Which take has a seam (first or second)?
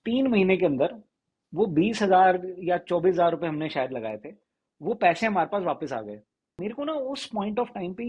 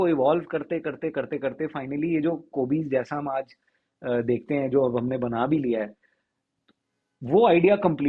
first